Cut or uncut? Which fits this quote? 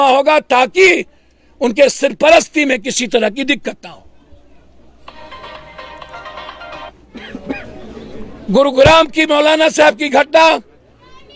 cut